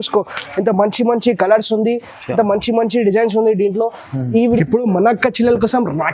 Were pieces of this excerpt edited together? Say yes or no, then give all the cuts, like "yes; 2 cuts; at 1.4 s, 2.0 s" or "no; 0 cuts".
yes; 1 cut; at 4.6 s